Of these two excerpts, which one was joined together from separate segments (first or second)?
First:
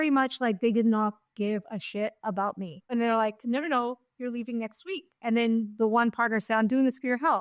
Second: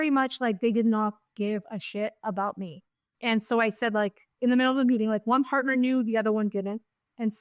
first